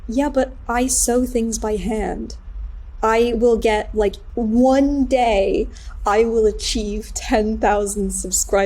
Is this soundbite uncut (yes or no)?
no